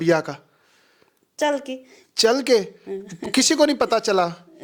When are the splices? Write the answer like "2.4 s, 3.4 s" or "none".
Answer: none